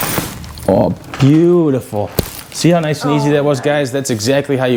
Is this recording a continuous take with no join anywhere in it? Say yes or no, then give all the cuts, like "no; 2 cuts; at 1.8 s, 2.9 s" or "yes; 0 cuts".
yes; 0 cuts